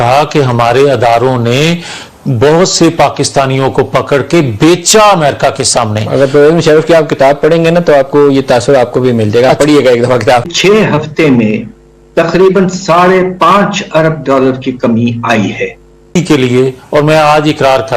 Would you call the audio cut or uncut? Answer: cut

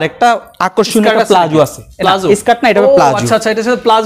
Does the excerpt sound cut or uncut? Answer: uncut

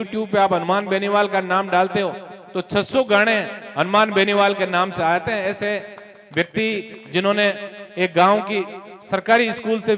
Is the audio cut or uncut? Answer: uncut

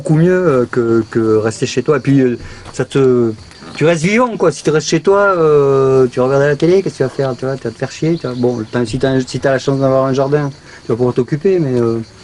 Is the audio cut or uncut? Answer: uncut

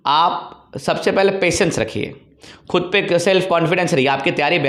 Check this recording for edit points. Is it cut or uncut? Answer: uncut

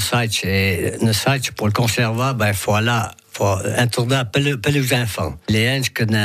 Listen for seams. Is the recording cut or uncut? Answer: uncut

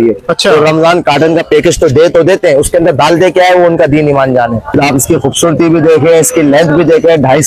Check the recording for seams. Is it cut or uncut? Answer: cut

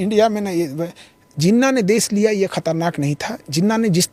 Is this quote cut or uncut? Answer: uncut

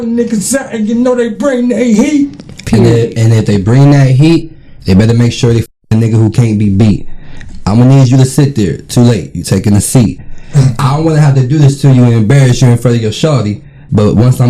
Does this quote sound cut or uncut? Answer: cut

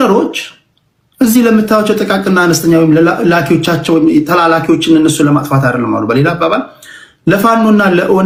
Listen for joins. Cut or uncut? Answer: uncut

